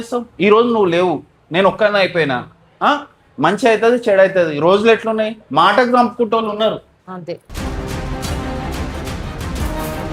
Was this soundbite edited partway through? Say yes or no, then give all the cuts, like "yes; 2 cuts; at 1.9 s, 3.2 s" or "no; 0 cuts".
no; 0 cuts